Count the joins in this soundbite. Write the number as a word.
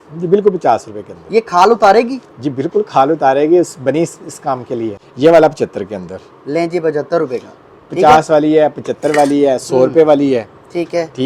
one